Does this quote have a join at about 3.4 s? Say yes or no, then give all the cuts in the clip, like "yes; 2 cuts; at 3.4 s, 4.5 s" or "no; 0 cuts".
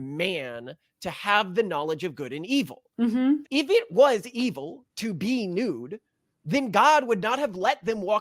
yes; 1 cut; at 3.4 s